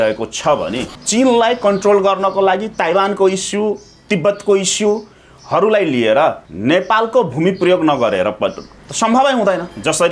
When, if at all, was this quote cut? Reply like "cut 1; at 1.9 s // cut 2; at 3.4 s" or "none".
cut 1; at 0.9 s // cut 2; at 6.5 s